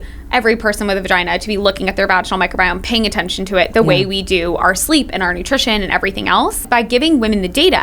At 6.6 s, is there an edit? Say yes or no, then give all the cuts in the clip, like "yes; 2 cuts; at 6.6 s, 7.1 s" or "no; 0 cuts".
yes; 1 cut; at 6.6 s